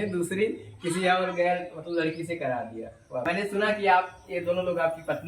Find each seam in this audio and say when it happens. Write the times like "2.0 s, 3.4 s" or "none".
3.2 s